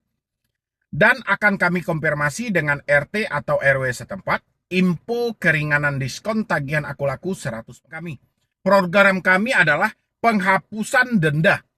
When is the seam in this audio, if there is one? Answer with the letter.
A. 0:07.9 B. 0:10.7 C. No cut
A